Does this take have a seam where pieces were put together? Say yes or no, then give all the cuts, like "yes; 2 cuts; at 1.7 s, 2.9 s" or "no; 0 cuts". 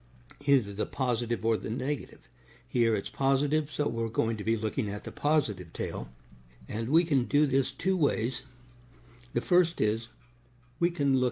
no; 0 cuts